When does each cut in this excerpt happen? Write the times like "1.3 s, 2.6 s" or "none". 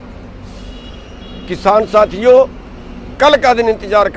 none